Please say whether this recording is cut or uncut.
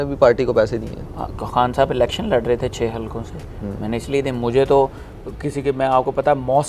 uncut